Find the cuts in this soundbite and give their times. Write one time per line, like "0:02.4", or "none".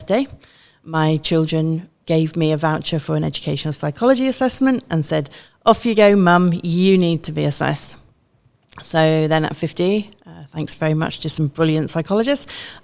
none